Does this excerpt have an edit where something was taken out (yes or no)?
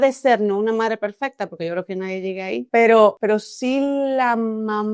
yes